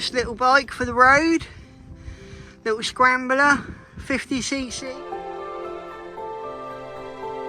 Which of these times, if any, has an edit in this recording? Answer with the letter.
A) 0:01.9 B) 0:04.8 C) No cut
B